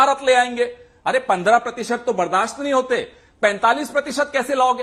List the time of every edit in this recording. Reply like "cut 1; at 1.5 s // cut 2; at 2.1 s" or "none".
none